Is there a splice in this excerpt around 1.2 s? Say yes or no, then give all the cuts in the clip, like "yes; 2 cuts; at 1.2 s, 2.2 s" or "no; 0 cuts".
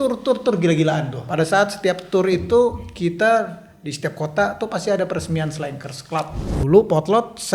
yes; 2 cuts; at 1.2 s, 6.4 s